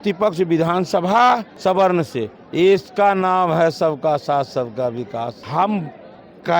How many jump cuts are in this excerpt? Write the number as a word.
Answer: two